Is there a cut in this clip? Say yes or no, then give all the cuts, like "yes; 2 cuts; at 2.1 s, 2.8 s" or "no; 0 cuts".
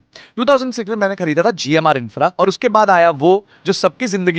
yes; 1 cut; at 2.3 s